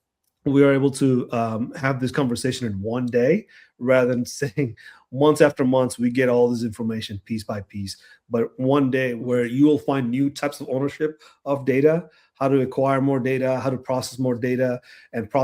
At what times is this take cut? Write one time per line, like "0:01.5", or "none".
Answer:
0:09.2